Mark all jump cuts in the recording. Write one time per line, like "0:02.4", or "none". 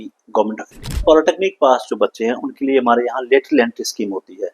0:01.0